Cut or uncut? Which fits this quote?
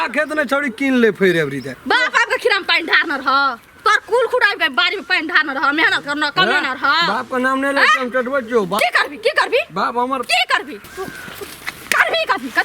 cut